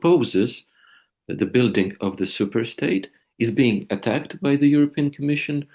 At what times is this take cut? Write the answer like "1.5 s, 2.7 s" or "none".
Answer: none

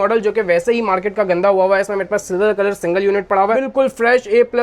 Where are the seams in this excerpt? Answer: 3.5 s

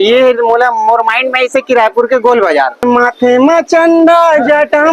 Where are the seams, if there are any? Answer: 2.8 s

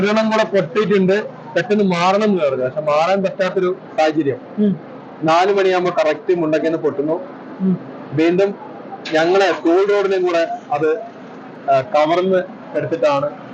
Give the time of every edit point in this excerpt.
none

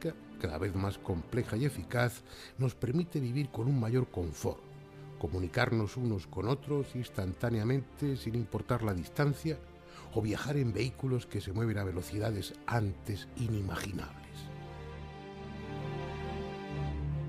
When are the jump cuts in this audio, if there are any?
none

